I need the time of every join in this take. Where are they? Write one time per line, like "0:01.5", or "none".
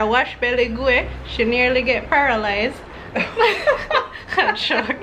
none

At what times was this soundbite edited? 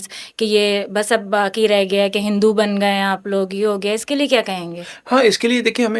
none

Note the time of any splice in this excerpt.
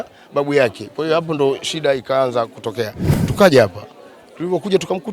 0:03.1

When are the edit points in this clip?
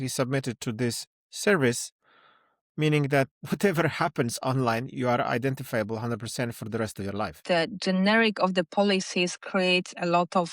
0:03.4
0:07.4

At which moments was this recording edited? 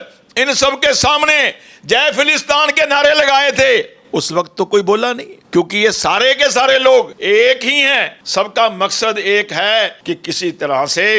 0:05.3
0:07.2
0:08.2
0:10.0

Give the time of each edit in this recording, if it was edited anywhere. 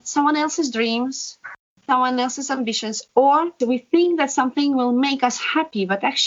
0:01.6
0:03.5

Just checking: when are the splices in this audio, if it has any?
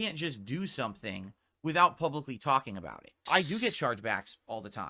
0:03.2

